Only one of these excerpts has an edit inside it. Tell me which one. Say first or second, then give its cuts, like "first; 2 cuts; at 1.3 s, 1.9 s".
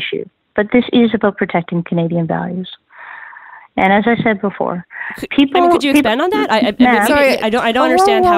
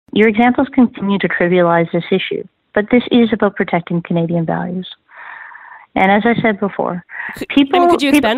second; 1 cut; at 1.0 s